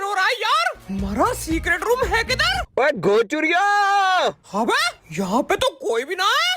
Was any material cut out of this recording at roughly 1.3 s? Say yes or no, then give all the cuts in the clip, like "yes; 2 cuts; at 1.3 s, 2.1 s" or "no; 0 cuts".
no; 2 cuts; at 2.5 s, 4.4 s